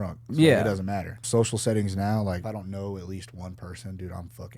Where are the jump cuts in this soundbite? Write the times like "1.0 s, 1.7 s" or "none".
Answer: 1.2 s, 2.4 s